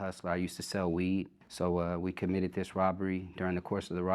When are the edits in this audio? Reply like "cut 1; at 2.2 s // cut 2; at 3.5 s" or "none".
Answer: cut 1; at 1.4 s